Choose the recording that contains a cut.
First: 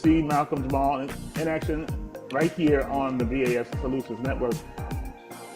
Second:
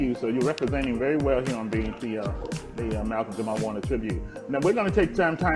second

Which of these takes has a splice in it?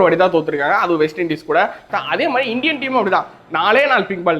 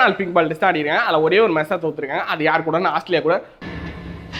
first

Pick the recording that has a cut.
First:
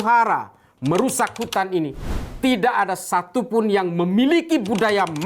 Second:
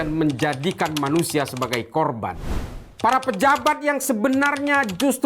second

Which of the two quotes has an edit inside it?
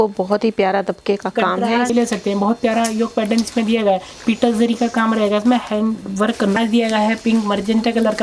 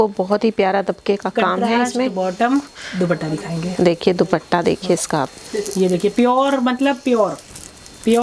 first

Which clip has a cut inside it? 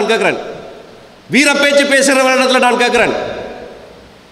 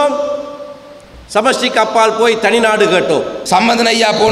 second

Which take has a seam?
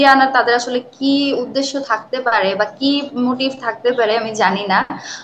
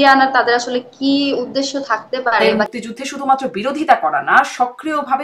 second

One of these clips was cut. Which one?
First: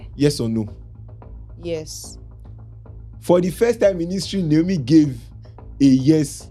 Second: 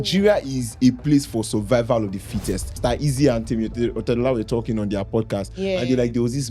second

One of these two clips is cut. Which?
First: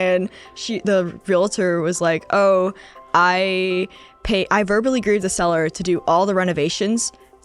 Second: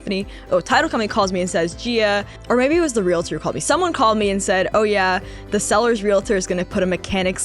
second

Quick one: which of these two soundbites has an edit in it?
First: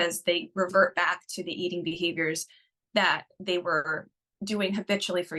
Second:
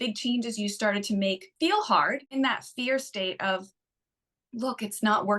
second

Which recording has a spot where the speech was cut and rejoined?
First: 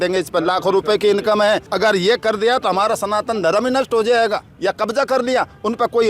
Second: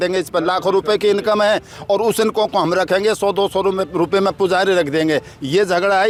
first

